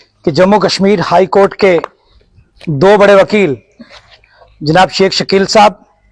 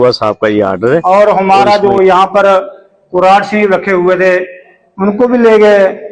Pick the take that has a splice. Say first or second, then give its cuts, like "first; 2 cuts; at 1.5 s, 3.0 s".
second; 1 cut; at 1.0 s